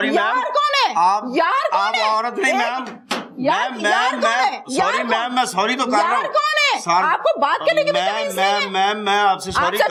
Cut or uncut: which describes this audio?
uncut